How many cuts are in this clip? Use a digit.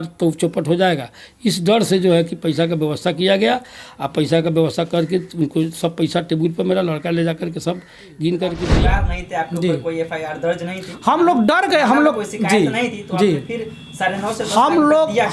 1